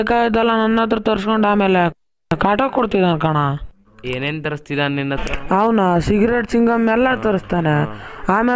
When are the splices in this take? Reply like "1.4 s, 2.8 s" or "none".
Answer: 6.0 s